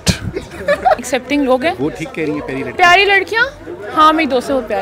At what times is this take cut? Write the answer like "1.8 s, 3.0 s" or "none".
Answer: 1.0 s